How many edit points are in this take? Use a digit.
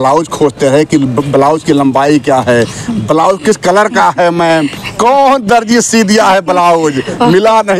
0